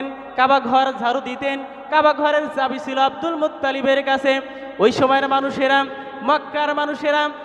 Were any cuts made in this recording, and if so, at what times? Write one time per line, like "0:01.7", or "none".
none